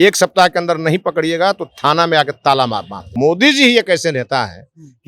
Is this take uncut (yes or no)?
no